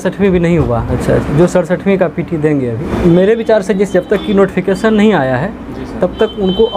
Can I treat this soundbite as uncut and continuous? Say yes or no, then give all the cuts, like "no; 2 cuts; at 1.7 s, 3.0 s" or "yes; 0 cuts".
no; 2 cuts; at 0.9 s, 2.8 s